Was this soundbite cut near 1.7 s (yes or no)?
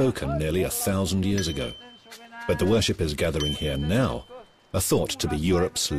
no